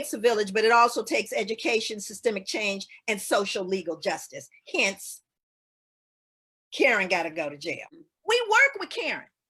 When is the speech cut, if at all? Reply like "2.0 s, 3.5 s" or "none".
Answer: 8.0 s